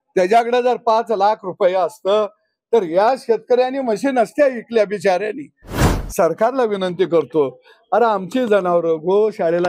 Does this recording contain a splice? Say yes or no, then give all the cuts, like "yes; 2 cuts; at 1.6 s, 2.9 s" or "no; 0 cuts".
yes; 1 cut; at 5.9 s